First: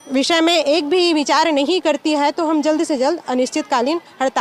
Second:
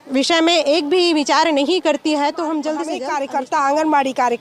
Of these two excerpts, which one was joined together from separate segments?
second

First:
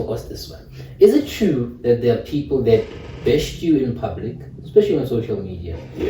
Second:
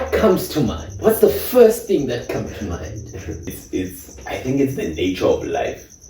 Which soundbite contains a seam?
second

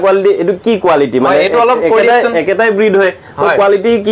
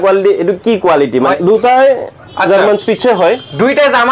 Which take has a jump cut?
second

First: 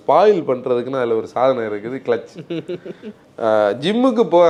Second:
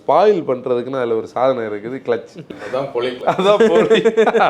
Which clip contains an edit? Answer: second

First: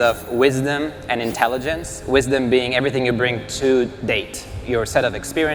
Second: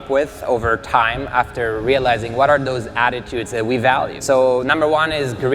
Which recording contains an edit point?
second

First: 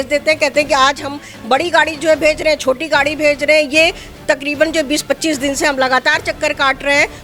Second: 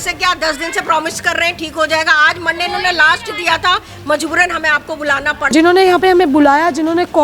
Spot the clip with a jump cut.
second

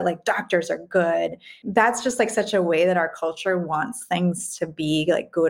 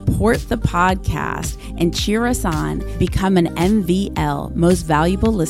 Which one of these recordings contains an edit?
first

